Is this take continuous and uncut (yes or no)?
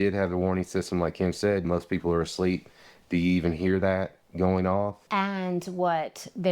no